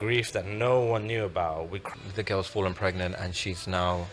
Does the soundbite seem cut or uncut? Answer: cut